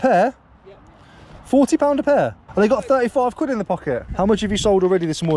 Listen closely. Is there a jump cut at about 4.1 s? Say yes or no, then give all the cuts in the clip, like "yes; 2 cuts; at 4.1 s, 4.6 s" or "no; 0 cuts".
yes; 2 cuts; at 2.4 s, 4.1 s